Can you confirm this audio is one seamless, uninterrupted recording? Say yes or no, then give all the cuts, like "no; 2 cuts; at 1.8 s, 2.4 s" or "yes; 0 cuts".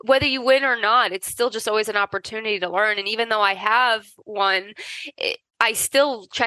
yes; 0 cuts